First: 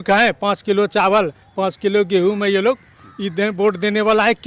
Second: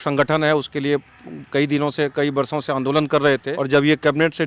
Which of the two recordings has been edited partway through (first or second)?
second